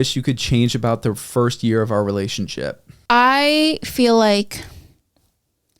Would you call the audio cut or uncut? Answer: cut